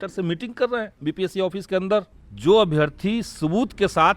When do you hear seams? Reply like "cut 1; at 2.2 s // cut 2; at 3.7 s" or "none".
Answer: cut 1; at 0.9 s // cut 2; at 2.2 s